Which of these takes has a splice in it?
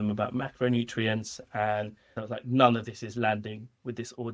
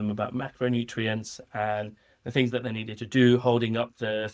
first; 1 cut; at 2.1 s

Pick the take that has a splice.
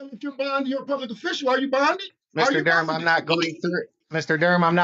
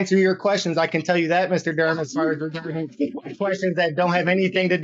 first; 2 cuts; at 2.1 s, 4.0 s

